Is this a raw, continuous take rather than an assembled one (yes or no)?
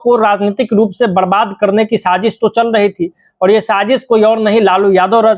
yes